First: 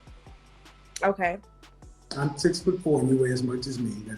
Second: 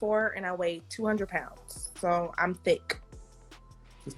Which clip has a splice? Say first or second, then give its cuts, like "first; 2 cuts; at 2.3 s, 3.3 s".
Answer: first; 1 cut; at 1.0 s